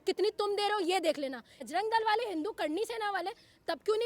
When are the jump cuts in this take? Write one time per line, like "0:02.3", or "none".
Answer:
0:01.5